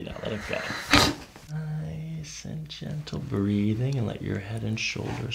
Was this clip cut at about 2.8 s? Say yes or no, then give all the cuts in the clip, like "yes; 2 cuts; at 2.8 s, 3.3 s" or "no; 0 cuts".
no; 1 cut; at 1.5 s